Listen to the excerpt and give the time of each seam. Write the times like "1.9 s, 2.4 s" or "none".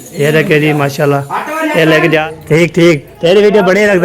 2.2 s